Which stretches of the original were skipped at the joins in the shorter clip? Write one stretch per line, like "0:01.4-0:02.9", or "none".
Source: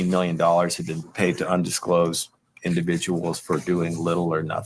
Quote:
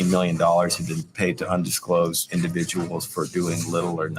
0:02.2-0:02.5